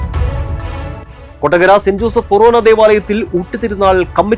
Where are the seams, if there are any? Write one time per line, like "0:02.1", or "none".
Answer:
none